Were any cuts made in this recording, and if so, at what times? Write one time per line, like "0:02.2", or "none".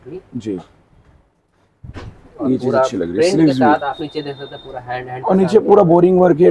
none